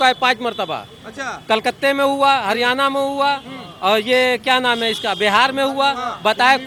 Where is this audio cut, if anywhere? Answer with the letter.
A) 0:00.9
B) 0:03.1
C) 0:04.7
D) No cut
D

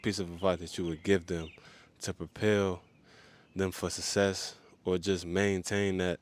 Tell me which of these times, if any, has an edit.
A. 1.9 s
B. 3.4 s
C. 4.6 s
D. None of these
D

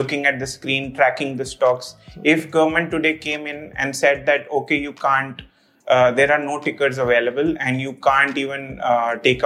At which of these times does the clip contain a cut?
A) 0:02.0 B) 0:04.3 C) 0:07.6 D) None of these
D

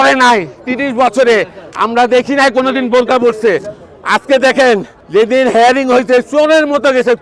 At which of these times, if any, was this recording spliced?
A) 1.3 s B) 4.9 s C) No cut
B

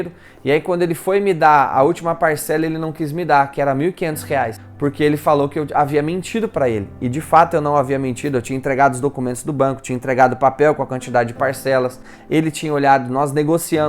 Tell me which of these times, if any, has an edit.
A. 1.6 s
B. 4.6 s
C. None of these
B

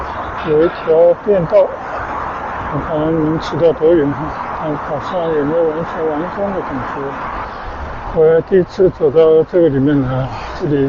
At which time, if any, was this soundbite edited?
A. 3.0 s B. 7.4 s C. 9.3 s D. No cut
B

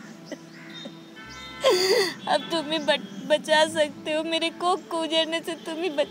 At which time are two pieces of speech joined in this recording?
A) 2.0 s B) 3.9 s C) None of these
C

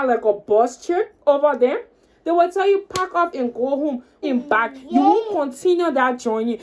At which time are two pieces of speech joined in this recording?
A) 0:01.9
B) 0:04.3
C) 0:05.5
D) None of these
B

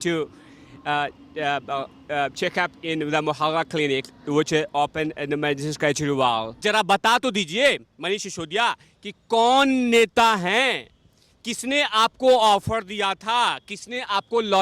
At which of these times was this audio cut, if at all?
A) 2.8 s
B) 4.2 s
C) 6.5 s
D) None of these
C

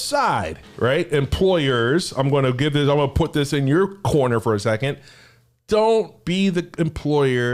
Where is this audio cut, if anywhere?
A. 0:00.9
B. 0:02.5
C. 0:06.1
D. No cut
D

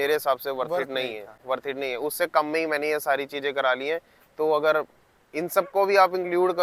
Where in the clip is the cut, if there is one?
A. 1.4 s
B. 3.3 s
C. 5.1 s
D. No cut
D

